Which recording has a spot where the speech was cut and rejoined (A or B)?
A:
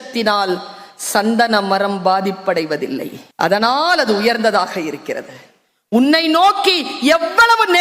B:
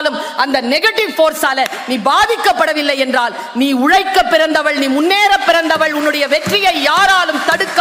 A